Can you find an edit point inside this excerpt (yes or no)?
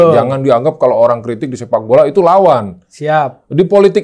no